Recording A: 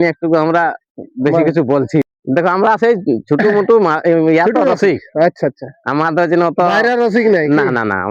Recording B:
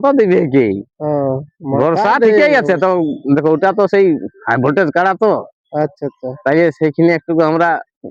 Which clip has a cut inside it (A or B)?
A